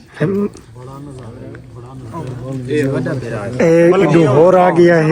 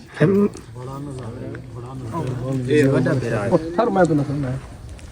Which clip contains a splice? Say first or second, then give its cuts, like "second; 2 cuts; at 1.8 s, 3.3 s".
second; 1 cut; at 3.5 s